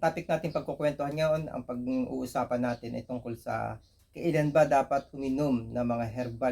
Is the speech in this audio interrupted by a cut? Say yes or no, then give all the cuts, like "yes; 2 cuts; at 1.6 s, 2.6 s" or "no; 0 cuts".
no; 0 cuts